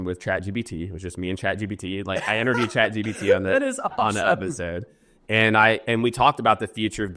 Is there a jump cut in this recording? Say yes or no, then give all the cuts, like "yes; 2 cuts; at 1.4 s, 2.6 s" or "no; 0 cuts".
no; 0 cuts